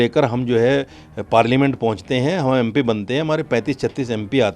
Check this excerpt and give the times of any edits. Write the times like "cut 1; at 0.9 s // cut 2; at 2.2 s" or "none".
none